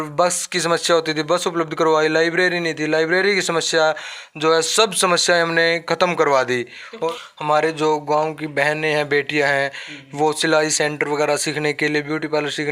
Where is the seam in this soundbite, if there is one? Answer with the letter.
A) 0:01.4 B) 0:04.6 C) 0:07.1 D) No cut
C